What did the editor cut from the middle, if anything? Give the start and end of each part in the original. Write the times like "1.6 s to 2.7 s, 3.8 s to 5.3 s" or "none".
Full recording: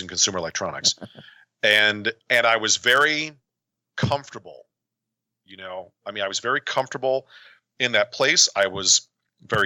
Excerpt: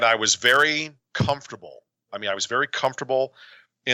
3.4 s to 3.8 s, 4.8 s to 6.0 s